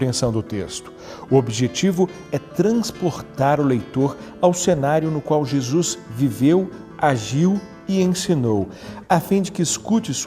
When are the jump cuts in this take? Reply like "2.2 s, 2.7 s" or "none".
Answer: 6.0 s